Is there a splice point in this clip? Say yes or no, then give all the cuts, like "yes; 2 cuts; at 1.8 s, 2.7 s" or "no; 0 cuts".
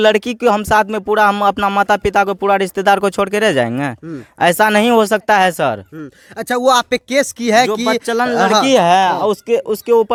no; 0 cuts